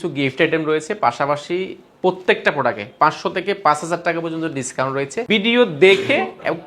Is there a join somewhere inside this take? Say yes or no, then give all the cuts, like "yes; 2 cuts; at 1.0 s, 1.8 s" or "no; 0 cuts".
yes; 1 cut; at 5.2 s